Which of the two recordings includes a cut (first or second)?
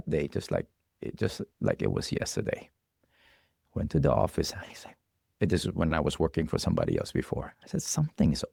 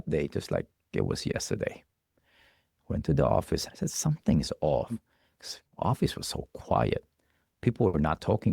second